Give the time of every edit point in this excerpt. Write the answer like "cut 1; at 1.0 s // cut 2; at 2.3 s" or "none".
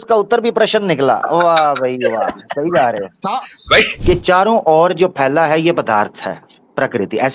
cut 1; at 3.9 s